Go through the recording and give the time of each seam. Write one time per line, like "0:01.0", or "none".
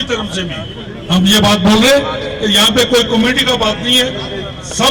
none